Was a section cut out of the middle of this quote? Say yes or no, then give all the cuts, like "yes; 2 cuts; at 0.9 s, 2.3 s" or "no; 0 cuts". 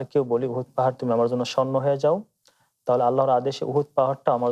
no; 0 cuts